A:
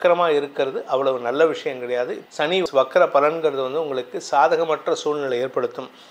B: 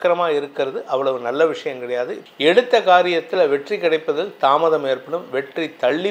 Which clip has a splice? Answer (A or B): B